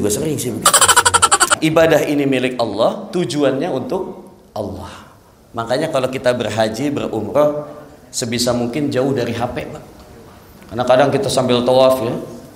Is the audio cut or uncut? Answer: cut